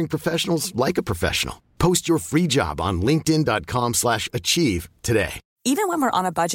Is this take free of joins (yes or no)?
no